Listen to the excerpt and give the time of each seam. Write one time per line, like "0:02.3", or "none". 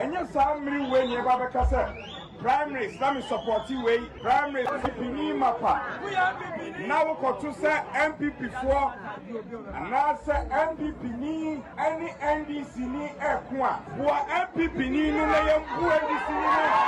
0:04.1
0:11.7
0:13.9